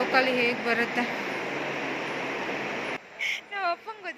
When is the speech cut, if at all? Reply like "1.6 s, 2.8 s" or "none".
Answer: 3.0 s